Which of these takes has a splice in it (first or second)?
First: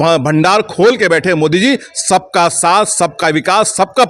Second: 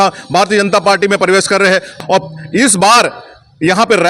second